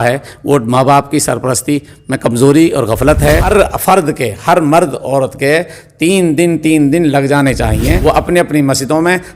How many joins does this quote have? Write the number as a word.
two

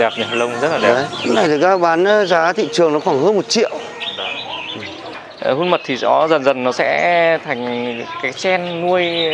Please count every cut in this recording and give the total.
two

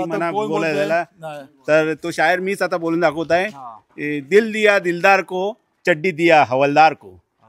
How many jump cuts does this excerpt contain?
zero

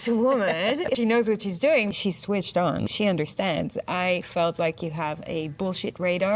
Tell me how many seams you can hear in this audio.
three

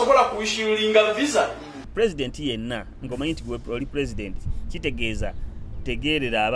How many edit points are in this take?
one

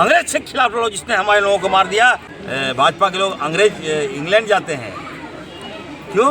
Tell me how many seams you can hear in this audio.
one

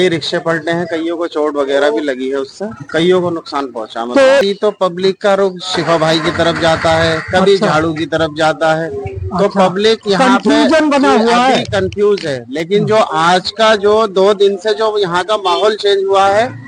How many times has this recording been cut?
one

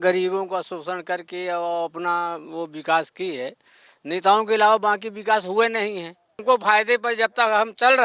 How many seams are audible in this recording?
one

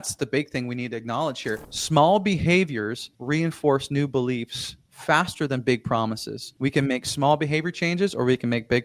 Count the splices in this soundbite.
one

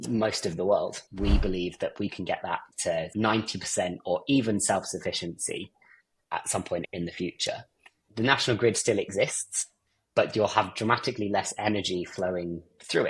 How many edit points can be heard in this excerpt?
two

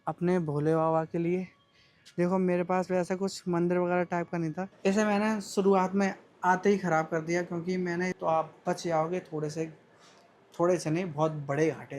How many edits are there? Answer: two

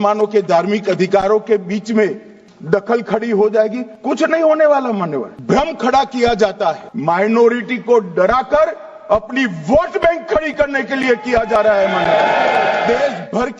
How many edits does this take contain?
three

